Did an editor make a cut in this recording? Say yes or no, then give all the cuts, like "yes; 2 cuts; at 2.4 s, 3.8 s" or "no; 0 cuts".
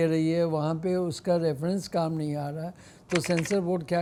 no; 0 cuts